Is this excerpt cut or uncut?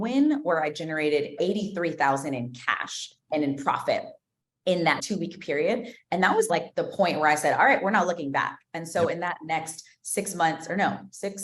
cut